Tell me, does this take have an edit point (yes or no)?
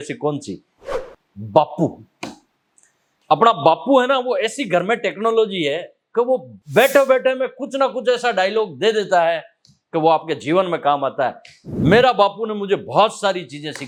no